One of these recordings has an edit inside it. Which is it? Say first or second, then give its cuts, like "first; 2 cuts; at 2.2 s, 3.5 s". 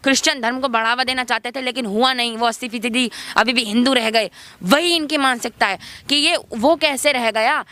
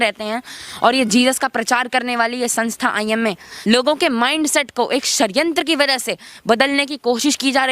second; 1 cut; at 3.5 s